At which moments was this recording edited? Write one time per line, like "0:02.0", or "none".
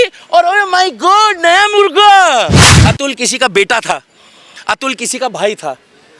0:02.7